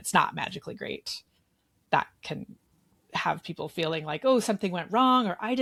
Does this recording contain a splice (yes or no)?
no